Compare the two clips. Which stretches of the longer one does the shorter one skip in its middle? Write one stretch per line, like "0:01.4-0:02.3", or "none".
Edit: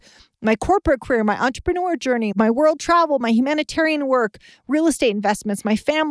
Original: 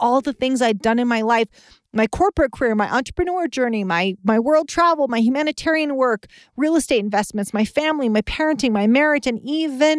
0:03.8-0:04.2